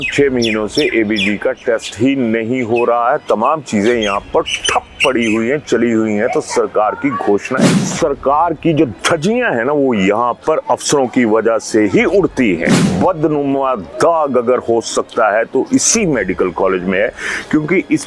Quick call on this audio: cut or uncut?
cut